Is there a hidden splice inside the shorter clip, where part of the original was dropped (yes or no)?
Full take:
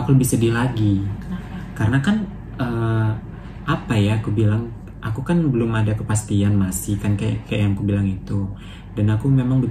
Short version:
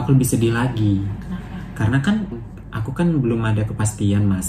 yes